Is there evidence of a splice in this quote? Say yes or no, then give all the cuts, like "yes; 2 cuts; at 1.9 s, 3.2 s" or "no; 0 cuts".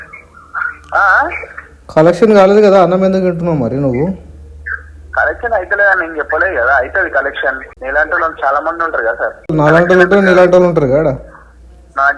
yes; 2 cuts; at 7.7 s, 9.5 s